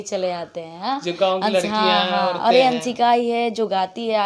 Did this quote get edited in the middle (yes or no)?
no